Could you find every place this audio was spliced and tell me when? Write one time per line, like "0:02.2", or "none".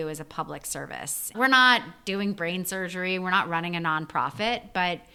none

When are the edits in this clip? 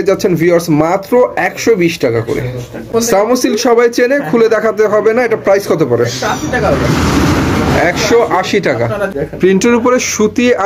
0:02.9
0:09.1

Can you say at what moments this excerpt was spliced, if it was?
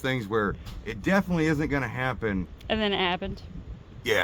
0:02.6

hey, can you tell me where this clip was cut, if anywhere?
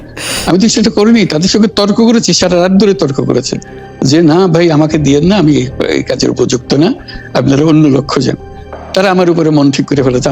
none

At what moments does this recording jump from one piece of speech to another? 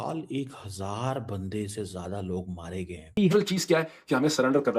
0:03.2

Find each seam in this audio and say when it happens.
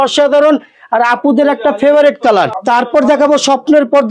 0:02.6

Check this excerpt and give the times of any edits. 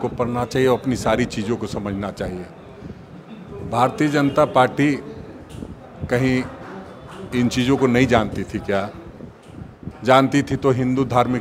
none

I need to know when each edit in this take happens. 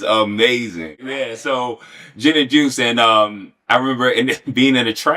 0:00.9

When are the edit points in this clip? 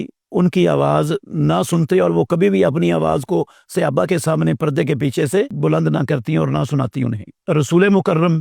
none

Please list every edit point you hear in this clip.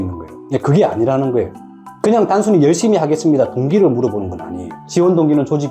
0:01.6

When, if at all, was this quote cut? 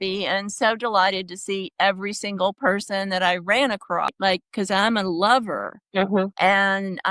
0:04.1

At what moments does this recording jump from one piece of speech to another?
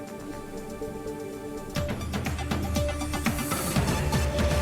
none

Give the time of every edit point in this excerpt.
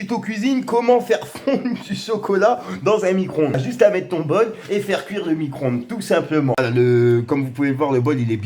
0:03.7
0:06.5

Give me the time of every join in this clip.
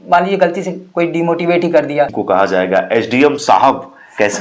0:02.2

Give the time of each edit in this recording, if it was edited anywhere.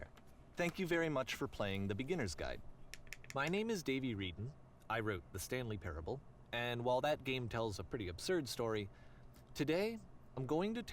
0:03.1

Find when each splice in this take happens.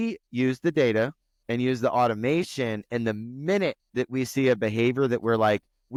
none

